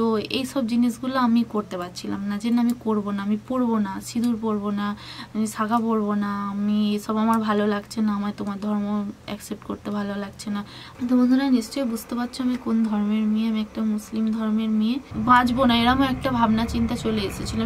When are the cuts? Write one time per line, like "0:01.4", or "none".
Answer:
0:10.8
0:15.1